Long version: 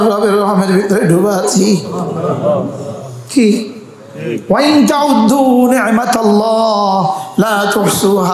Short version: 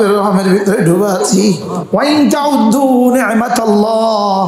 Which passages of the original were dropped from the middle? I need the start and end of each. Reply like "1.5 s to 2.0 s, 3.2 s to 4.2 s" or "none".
2.0 s to 4.4 s